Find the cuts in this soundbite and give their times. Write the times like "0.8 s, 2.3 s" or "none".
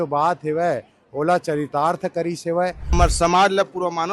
2.9 s